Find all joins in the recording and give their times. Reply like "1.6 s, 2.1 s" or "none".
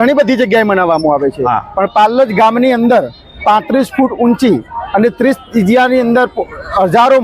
none

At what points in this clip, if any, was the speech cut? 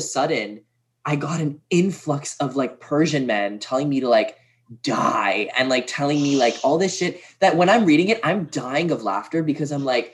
none

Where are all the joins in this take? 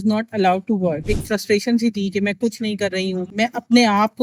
1.1 s

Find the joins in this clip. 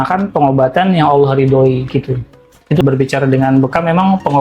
2.8 s

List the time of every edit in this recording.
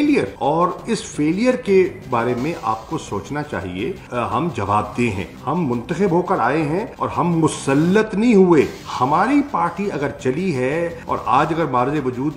8.8 s

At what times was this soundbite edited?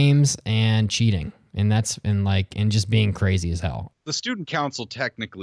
4.0 s

